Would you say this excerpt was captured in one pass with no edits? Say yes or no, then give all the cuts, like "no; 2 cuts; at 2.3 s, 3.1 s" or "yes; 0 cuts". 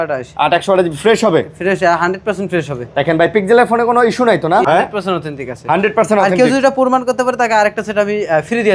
no; 1 cut; at 4.6 s